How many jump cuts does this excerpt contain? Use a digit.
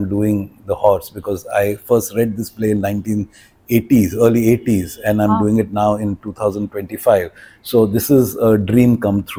0